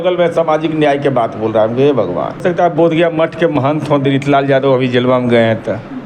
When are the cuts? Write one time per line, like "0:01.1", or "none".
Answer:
0:02.4